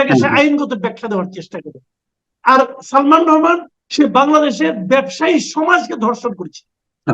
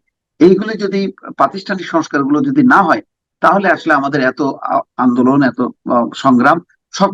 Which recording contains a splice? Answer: first; 1 cut; at 3.8 s

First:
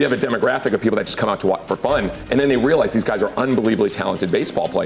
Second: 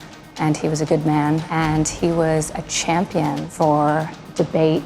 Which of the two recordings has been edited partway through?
second; 2 cuts; at 1.5 s, 3.5 s

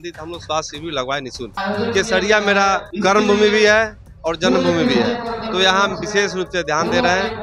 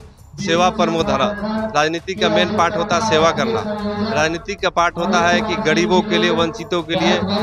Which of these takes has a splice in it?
first; 2 cuts; at 1.6 s, 2.9 s

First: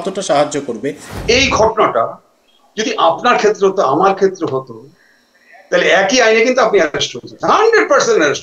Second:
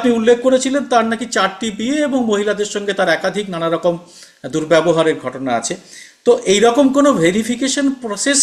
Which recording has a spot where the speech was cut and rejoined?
first; 1 cut; at 1.1 s

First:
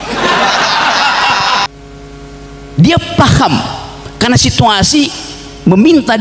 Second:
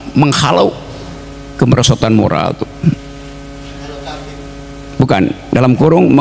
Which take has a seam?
first; 1 cut; at 1.7 s

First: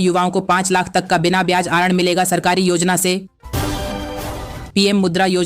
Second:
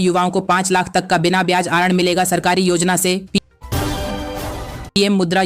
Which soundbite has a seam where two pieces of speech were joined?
first; 2 cuts; at 3.3 s, 4.6 s

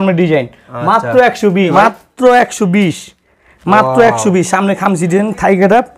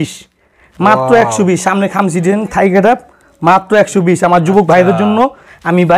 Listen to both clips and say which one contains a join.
first; 1 cut; at 1.7 s

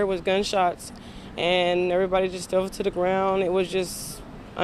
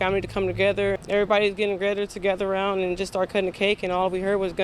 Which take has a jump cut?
second; 1 cut; at 1.0 s

